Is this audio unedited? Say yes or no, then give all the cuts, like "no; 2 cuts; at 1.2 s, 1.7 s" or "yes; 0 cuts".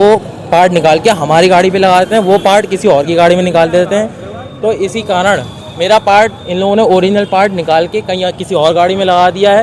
yes; 0 cuts